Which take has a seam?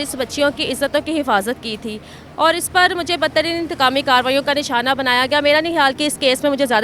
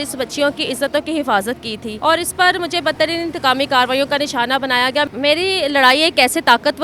second; 2 cuts; at 1.8 s, 5.1 s

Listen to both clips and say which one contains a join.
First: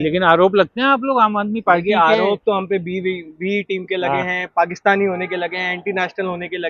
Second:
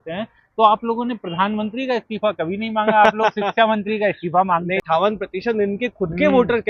second; 1 cut; at 4.8 s

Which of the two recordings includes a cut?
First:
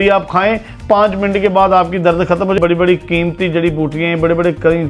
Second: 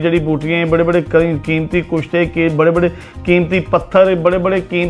first; 1 cut; at 2.6 s

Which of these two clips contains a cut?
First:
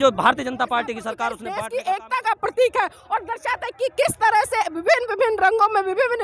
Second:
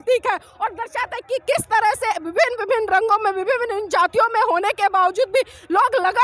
first; 1 cut; at 1.5 s

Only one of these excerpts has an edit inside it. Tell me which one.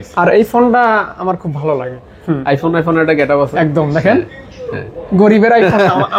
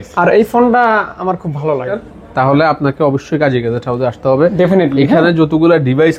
second; 1 cut; at 2.1 s

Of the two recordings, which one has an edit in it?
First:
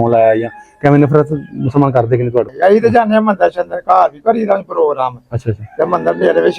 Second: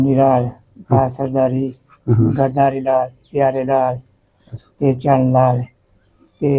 first; 1 cut; at 2.5 s

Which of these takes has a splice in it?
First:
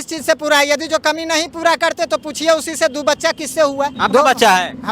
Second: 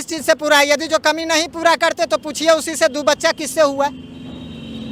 first; 1 cut; at 3.9 s

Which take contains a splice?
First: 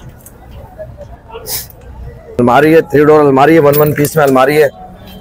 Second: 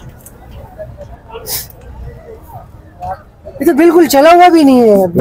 first; 1 cut; at 2.4 s

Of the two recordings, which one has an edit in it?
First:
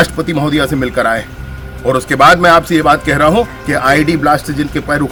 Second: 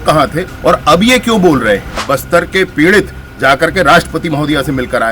second; 1 cut; at 1.9 s

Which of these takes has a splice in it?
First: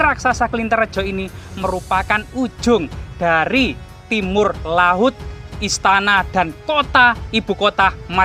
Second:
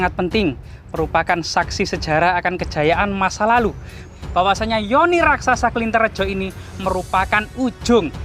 second; 1 cut; at 4.0 s

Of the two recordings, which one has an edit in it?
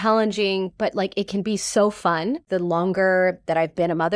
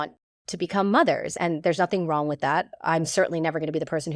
first; 1 cut; at 2.4 s

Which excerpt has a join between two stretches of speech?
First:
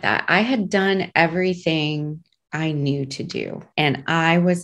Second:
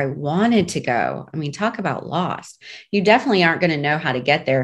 first; 1 cut; at 3.6 s

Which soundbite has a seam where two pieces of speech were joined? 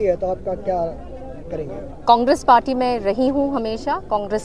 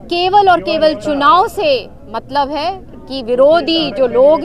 first; 1 cut; at 1.9 s

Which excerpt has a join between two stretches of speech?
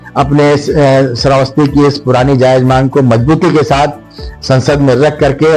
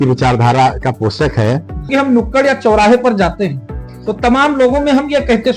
second; 1 cut; at 1.9 s

